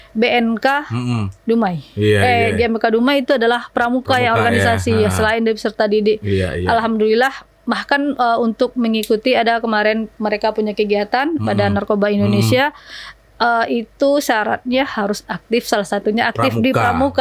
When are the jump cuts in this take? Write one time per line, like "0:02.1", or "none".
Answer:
none